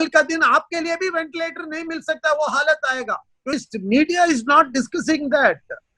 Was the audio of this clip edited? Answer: yes; 1 cut; at 3.5 s

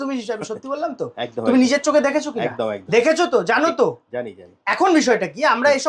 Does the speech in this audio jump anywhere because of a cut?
no; 0 cuts

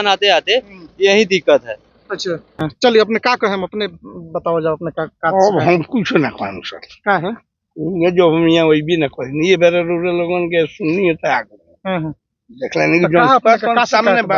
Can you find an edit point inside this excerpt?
yes; 1 cut; at 2.5 s

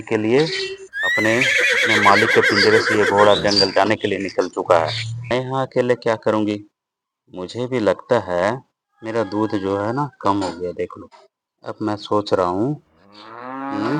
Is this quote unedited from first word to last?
no; 1 cut; at 5.3 s

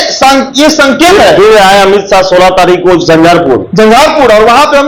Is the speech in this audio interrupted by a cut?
no; 0 cuts

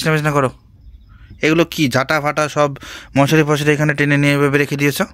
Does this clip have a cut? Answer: no; 0 cuts

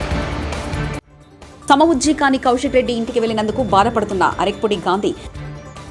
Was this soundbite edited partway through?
no; 0 cuts

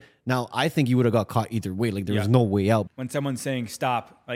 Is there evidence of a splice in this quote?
yes; 1 cut; at 2.9 s

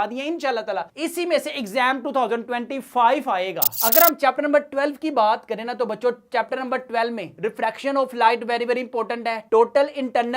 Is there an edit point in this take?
no; 0 cuts

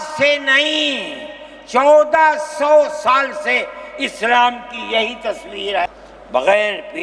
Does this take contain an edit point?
yes; 1 cut; at 5.9 s

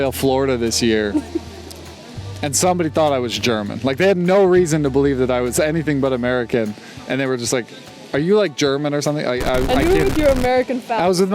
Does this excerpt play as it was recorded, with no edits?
yes; 0 cuts

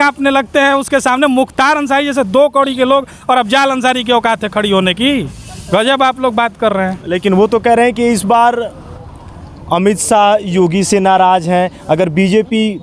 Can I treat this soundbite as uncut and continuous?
yes; 0 cuts

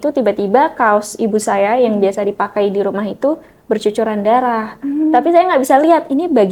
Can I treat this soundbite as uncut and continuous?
yes; 0 cuts

